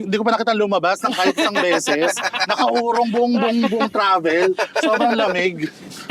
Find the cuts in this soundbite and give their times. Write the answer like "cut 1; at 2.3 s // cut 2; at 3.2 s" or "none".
none